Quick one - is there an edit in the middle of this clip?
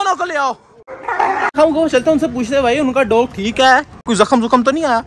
yes; 1 cut; at 1.5 s

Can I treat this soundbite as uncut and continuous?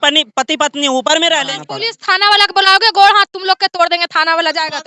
no; 1 cut; at 1.5 s

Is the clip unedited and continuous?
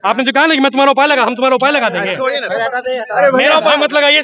yes; 0 cuts

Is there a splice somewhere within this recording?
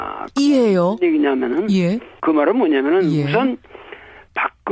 no; 0 cuts

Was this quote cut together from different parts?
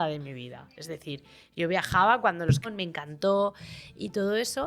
yes; 1 cut; at 2.7 s

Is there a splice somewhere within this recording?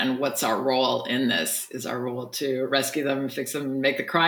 no; 0 cuts

